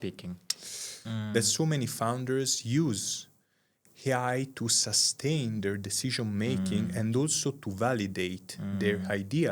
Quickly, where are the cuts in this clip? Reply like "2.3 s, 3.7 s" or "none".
1.0 s